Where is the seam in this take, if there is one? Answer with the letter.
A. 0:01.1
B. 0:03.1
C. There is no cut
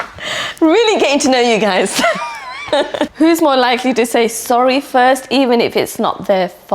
B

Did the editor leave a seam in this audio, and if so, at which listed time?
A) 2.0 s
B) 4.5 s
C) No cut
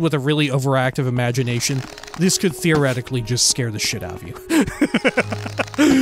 C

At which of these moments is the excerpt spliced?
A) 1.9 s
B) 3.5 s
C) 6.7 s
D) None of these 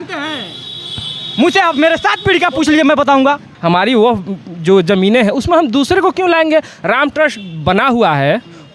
B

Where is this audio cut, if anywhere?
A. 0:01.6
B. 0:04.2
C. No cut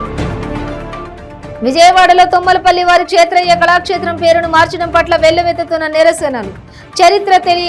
A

